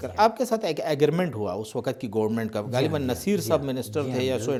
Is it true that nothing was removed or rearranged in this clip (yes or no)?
yes